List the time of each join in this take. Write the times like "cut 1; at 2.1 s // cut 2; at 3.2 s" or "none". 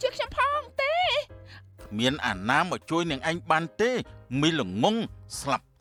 none